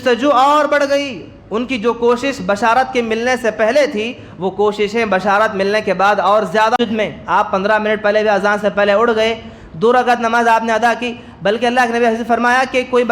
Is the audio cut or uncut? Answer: cut